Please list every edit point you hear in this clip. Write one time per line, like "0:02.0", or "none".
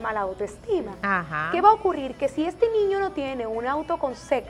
none